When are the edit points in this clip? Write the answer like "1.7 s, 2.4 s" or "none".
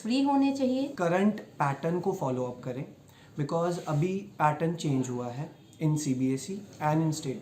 0.9 s